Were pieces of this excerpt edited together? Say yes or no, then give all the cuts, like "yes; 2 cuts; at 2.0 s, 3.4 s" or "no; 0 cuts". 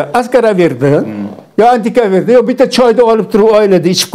no; 0 cuts